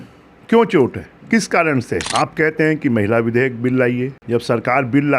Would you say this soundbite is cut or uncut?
cut